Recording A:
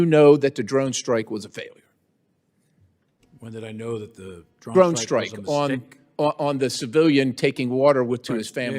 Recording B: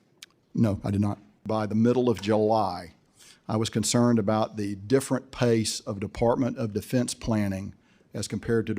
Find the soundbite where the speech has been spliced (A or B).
B